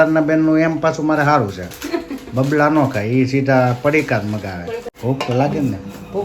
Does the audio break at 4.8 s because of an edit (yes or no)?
yes